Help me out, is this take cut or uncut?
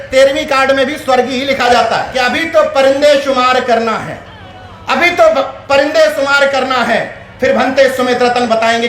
cut